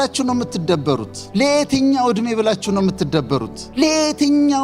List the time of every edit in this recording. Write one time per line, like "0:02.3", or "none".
0:01.2
0:03.6